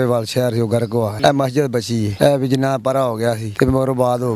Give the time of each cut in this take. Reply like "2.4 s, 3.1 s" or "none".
1.1 s, 2.1 s, 3.5 s